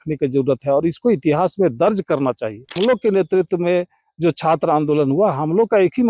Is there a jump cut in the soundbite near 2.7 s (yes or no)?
yes